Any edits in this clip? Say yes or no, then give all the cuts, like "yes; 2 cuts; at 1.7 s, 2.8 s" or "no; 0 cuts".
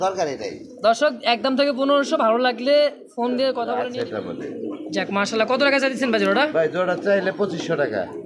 yes; 1 cut; at 3.5 s